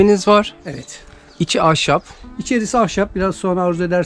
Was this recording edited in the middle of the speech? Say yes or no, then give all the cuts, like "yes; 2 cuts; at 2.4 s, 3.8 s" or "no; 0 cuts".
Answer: no; 0 cuts